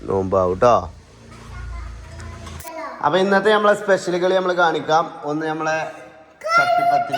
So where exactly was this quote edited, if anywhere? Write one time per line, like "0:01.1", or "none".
0:02.7